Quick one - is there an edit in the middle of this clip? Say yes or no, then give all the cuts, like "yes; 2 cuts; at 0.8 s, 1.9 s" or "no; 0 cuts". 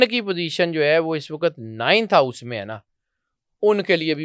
no; 0 cuts